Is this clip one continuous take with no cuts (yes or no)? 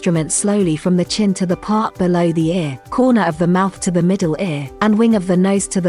no